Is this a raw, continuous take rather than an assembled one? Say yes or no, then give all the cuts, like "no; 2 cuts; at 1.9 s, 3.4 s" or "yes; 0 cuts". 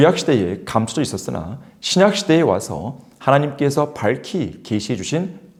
yes; 0 cuts